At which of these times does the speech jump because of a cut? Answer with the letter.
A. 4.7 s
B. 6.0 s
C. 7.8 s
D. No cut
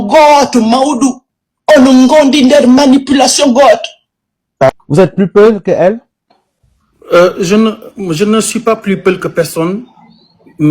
A